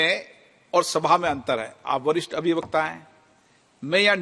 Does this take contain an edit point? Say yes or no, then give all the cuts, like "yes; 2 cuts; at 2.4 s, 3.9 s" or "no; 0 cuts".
no; 0 cuts